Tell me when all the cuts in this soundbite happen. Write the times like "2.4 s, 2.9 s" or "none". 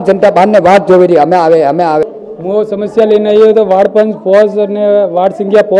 2.0 s